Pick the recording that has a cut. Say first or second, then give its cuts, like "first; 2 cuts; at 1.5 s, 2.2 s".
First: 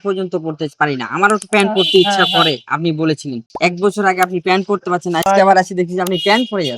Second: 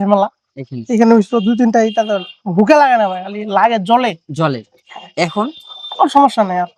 first; 2 cuts; at 3.4 s, 5.3 s